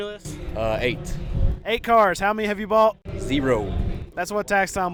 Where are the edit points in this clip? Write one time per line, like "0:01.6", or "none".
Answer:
none